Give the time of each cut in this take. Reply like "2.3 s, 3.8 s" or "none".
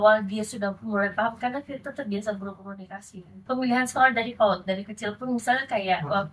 3.3 s